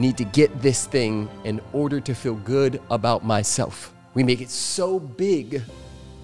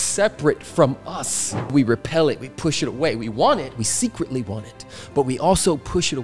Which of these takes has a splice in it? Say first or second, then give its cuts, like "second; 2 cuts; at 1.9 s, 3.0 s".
second; 1 cut; at 1.7 s